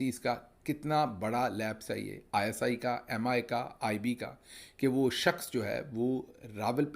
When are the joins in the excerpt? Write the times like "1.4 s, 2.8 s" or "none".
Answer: none

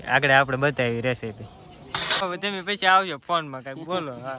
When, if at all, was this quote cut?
2.2 s

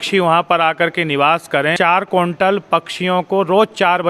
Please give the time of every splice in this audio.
1.7 s

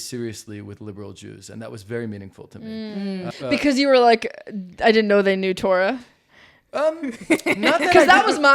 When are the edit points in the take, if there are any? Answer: 3.3 s

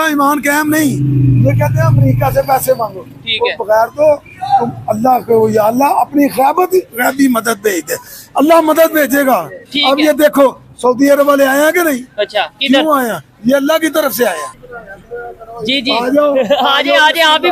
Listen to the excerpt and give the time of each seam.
14.5 s

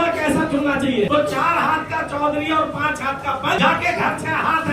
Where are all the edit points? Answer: 1.1 s, 3.6 s

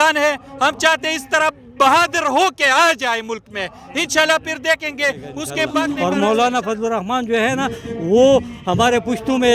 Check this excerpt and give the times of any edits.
5.7 s

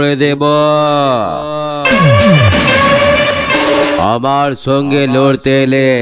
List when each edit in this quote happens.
none

